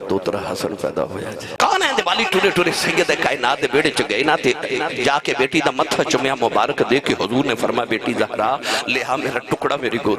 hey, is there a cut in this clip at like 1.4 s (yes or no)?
yes